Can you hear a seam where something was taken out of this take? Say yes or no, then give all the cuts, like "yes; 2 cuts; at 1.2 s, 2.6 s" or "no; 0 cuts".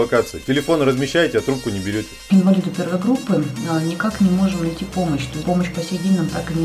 yes; 2 cuts; at 2.2 s, 5.4 s